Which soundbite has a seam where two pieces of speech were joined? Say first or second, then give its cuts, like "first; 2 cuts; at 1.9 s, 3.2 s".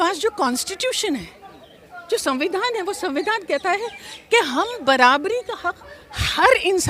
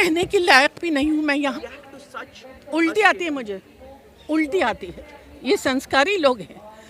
second; 1 cut; at 1.6 s